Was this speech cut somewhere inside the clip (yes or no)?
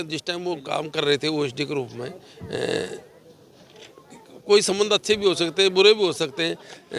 no